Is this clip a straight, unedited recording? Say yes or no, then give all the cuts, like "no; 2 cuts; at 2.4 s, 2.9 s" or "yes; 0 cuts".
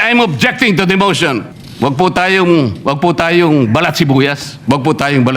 no; 2 cuts; at 1.6 s, 4.5 s